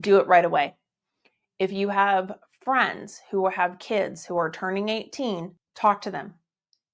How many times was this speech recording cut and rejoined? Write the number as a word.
one